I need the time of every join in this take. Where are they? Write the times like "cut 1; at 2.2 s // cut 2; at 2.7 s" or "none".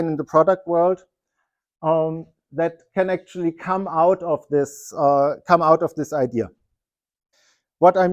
none